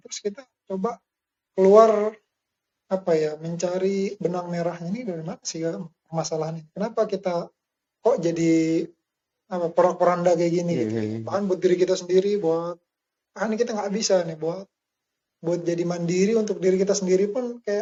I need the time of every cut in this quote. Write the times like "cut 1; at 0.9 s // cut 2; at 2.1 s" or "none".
none